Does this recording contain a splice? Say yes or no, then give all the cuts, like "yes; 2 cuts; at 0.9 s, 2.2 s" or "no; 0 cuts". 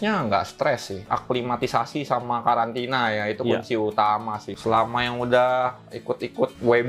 yes; 2 cuts; at 0.9 s, 4.4 s